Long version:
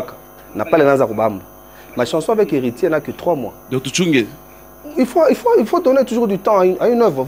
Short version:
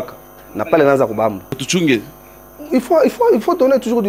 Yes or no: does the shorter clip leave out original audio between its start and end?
yes